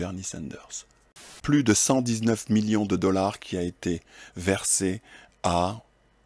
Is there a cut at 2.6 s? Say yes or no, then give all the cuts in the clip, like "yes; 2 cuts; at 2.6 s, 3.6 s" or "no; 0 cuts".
no; 1 cut; at 1.3 s